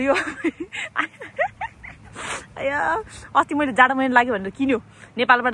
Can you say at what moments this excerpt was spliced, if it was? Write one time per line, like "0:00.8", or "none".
none